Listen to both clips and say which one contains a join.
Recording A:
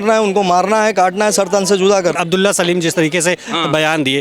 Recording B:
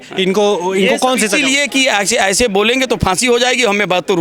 A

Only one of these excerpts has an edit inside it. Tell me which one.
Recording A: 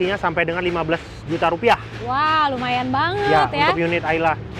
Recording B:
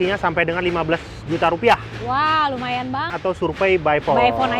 B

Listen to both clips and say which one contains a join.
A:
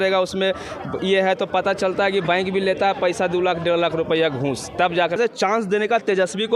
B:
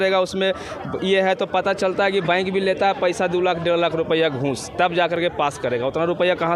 A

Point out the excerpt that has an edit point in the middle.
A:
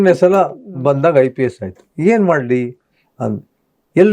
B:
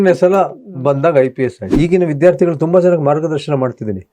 B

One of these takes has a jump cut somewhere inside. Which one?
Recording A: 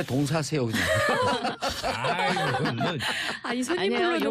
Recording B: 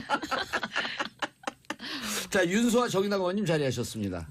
A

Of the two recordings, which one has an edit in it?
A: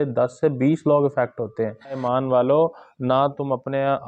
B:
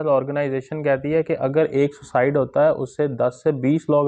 A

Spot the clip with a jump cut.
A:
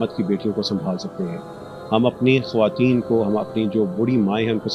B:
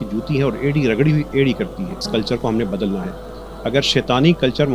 B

